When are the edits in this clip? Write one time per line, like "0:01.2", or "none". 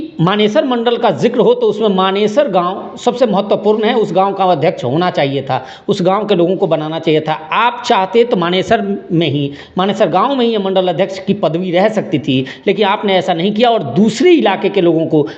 none